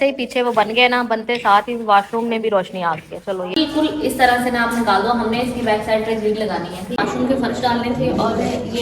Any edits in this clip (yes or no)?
yes